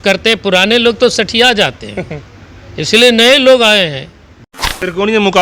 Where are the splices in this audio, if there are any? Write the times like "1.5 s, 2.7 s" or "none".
4.5 s